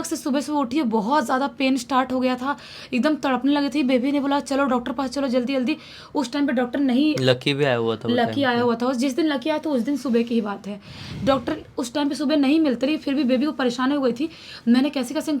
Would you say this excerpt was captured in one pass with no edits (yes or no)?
yes